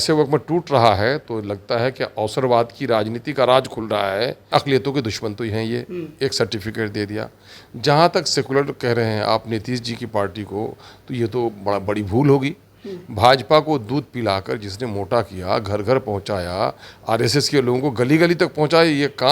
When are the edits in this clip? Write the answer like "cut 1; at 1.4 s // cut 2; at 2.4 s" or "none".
cut 1; at 4.5 s